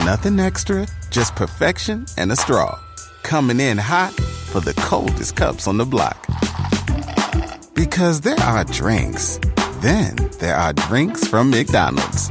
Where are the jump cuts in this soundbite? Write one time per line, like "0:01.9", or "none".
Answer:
none